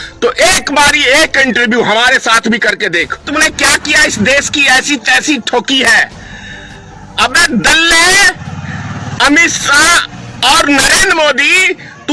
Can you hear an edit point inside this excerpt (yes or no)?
yes